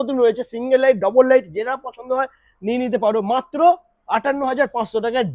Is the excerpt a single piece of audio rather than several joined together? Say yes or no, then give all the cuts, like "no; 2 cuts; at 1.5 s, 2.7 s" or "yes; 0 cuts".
yes; 0 cuts